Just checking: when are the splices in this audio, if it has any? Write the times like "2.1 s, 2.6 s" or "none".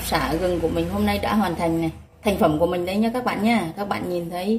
2.0 s